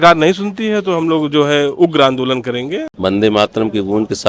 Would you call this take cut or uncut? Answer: cut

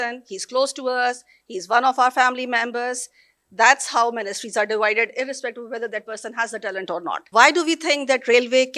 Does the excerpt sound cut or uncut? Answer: cut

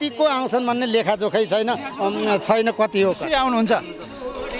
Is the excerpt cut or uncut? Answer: uncut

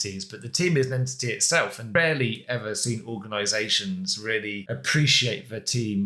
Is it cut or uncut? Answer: cut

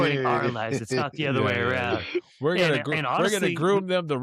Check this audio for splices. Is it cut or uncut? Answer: uncut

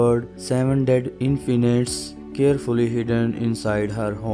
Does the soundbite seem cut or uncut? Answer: uncut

